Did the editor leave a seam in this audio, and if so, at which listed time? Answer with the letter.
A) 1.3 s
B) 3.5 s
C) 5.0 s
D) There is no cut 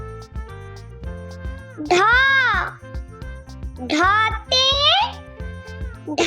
A